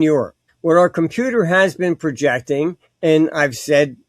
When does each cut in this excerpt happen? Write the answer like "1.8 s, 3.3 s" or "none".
2.8 s